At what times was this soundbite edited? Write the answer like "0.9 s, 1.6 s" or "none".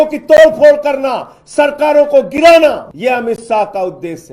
2.9 s